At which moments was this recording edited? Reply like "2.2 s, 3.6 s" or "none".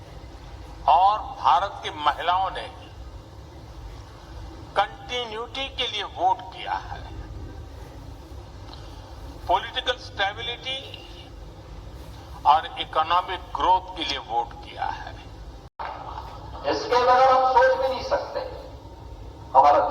15.4 s